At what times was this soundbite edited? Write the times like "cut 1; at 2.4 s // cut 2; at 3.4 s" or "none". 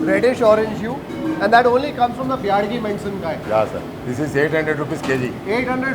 cut 1; at 3.9 s

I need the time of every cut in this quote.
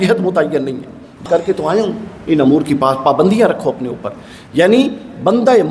cut 1; at 1.2 s

